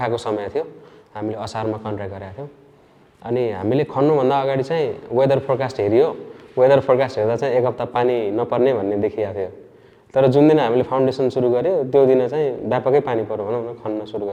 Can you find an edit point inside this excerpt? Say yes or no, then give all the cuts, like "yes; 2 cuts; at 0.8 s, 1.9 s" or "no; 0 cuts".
no; 0 cuts